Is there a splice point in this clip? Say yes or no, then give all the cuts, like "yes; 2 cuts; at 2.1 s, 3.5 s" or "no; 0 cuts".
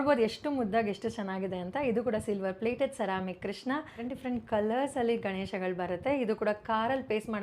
yes; 1 cut; at 4.1 s